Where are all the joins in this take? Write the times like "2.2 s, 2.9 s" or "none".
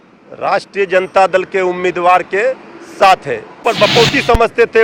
3.6 s